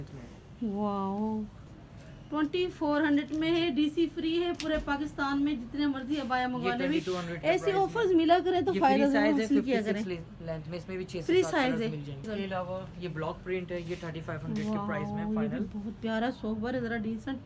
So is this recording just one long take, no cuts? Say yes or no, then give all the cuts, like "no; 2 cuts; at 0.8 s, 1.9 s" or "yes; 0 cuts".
no; 2 cuts; at 1.6 s, 12.1 s